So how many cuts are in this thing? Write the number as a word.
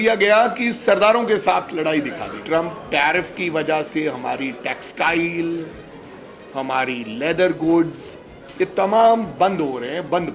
one